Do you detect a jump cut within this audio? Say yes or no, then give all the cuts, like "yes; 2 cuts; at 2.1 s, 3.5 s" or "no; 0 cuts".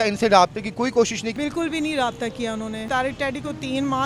yes; 2 cuts; at 1.2 s, 2.8 s